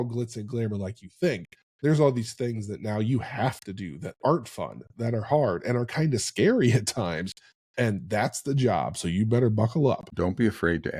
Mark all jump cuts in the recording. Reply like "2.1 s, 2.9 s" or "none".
10.1 s